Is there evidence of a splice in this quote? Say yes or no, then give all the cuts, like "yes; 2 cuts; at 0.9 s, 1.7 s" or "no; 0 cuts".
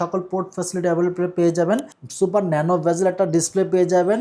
yes; 1 cut; at 2.0 s